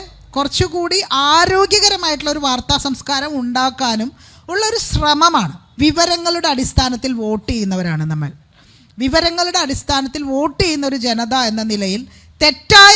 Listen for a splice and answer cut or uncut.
cut